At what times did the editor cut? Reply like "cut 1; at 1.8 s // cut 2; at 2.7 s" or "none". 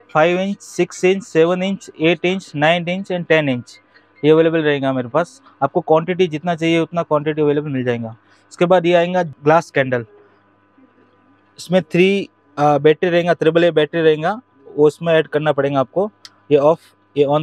none